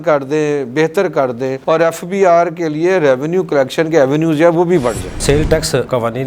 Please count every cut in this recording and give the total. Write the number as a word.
two